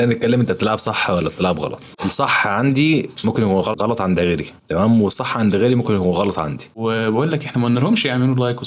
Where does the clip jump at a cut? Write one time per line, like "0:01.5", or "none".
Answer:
0:01.9
0:03.7
0:06.6